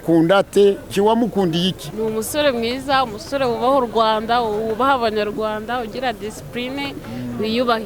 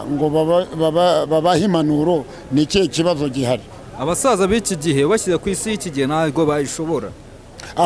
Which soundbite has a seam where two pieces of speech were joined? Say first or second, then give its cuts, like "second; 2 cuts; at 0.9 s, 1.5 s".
first; 2 cuts; at 0.9 s, 1.8 s